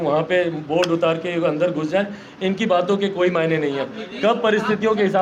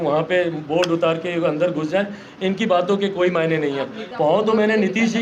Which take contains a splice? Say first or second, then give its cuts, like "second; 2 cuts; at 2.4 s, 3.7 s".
second; 1 cut; at 4.0 s